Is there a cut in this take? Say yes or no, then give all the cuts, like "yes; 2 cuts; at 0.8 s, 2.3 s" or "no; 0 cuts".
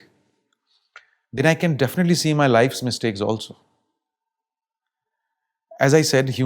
no; 0 cuts